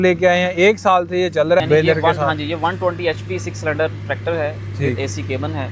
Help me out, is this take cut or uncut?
cut